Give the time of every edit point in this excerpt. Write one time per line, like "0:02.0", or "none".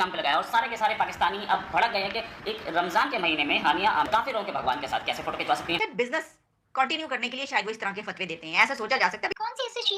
0:05.8
0:09.3